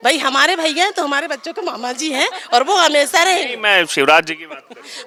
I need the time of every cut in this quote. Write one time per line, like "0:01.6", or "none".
none